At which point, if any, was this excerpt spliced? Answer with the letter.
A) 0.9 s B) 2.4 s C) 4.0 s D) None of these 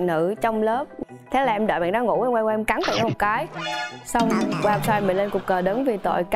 A